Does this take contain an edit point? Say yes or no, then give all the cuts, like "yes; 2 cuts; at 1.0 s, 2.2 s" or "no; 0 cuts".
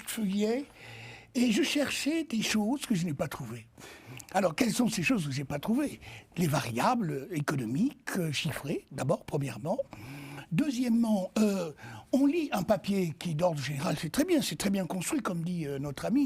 no; 0 cuts